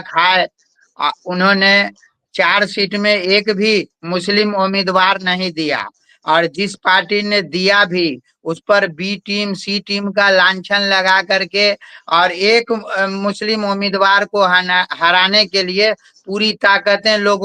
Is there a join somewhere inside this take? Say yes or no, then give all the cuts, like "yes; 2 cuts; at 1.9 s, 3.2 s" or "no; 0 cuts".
no; 0 cuts